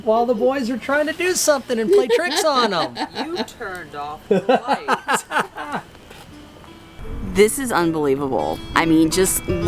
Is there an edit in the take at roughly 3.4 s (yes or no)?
no